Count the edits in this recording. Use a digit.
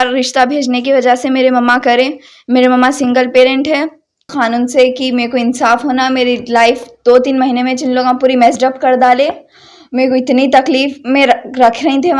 1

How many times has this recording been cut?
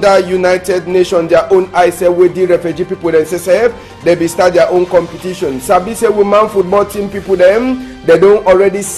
1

